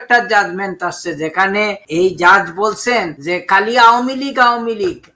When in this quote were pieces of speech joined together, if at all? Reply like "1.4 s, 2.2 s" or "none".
1.8 s, 3.2 s

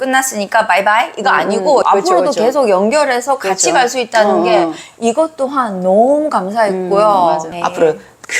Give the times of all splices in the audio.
1.8 s, 7.5 s

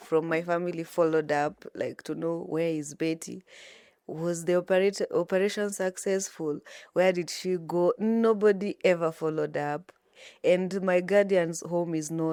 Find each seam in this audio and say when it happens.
none

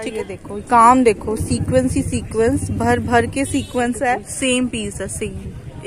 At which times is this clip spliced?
4.7 s

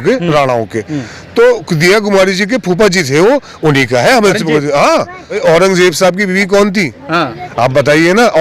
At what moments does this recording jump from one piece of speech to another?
5.4 s

